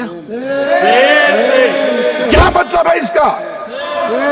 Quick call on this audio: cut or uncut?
cut